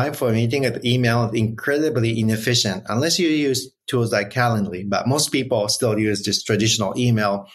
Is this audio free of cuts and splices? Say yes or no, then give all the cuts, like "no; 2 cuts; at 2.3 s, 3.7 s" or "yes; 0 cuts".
yes; 0 cuts